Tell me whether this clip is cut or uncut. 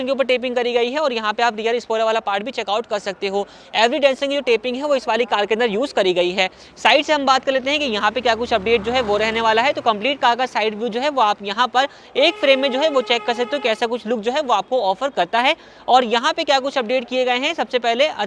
uncut